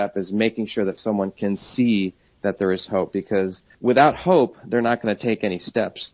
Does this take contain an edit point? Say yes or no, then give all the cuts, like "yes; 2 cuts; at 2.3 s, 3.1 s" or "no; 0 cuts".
no; 0 cuts